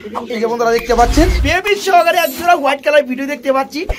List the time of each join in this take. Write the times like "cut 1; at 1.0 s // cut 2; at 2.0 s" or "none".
cut 1; at 1.4 s